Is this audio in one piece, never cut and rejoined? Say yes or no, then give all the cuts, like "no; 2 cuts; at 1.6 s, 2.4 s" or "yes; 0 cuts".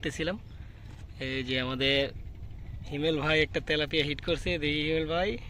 yes; 0 cuts